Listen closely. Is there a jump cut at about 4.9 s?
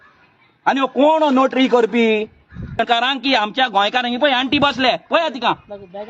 no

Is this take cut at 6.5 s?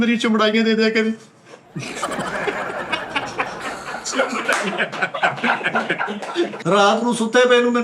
yes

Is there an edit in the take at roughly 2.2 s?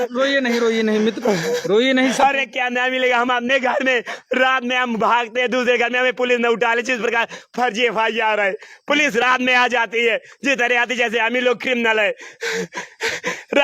yes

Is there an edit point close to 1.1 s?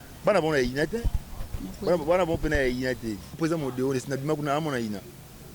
no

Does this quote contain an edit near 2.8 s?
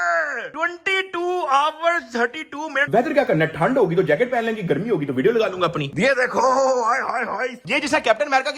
yes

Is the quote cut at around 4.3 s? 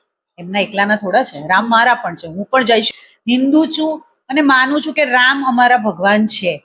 no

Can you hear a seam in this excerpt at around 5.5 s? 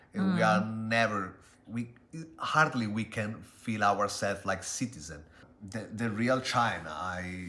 yes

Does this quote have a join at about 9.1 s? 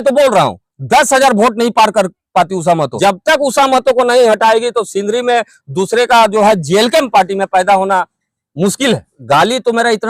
yes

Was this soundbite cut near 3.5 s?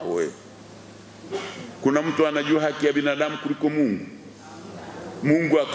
no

